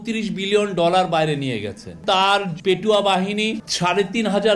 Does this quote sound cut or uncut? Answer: cut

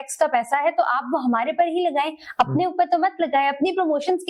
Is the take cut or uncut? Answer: uncut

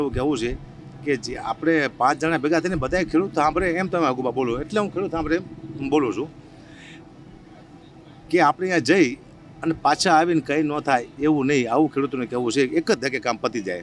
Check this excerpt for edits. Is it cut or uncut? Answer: uncut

